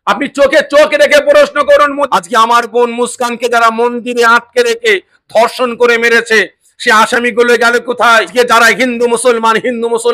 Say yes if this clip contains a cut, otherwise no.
yes